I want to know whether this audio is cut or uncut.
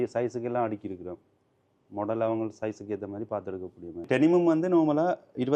cut